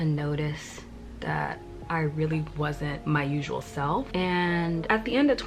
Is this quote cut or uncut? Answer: uncut